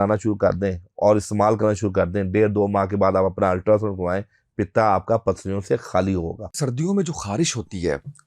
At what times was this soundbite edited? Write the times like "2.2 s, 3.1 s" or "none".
6.6 s